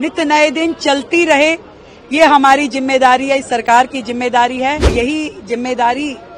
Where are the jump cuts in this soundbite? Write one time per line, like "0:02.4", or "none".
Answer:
0:04.9